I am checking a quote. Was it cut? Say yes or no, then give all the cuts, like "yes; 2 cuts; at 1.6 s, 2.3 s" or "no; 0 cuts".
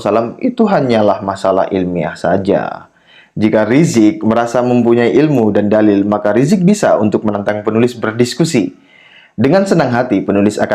no; 0 cuts